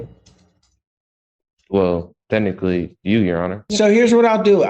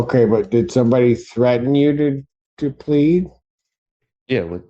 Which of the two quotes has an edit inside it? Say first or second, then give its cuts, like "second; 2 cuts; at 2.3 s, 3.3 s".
first; 1 cut; at 3.6 s